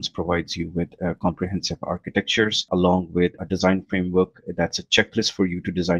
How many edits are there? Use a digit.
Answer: 2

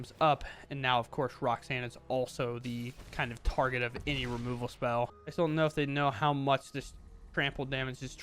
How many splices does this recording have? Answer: 1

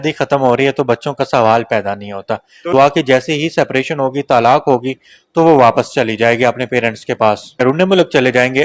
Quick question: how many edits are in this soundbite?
2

